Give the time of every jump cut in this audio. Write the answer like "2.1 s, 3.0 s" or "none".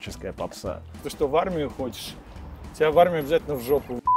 1.0 s

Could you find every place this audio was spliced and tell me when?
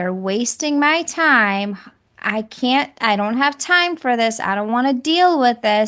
none

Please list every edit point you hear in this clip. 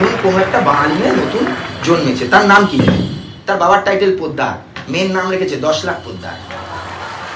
6.4 s

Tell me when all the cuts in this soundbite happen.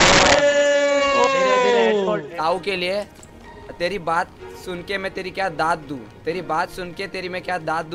2.2 s, 3.2 s

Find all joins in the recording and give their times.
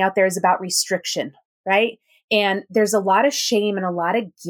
none

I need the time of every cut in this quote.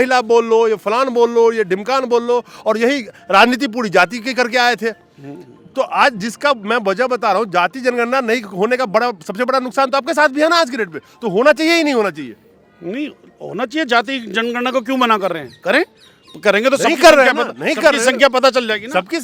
none

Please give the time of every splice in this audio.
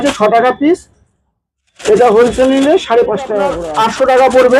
3.6 s

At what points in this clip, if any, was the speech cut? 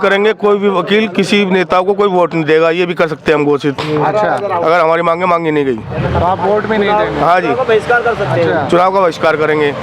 none

